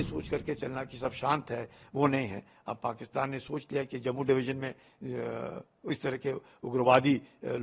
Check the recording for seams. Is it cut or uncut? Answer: uncut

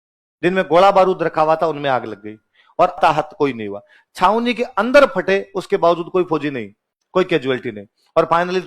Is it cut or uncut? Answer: cut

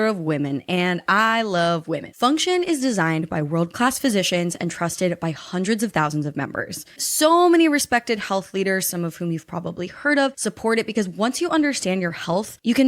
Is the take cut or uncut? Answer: cut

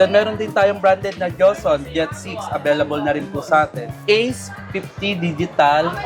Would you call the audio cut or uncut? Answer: cut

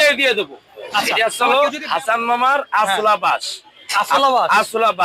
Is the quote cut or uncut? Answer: cut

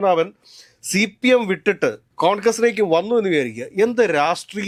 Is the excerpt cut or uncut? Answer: uncut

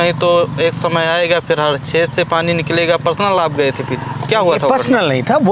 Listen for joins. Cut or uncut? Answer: uncut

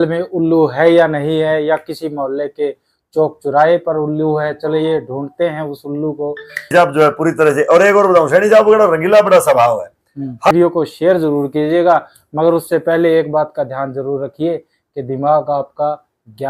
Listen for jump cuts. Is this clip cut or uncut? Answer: cut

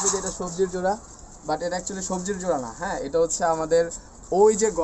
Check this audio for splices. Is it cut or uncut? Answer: uncut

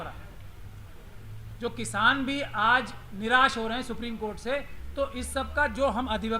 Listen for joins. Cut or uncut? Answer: uncut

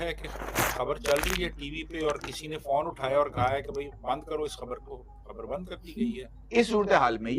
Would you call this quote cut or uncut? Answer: cut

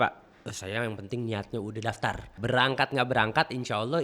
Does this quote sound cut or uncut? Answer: cut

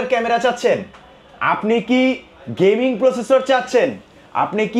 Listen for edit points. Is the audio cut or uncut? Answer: uncut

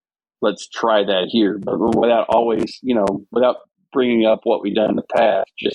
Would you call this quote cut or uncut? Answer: uncut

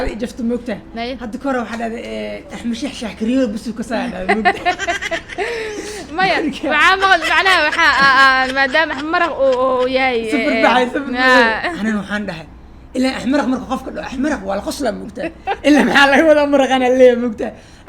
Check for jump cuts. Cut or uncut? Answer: cut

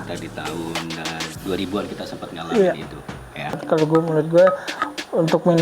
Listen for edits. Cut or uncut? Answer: cut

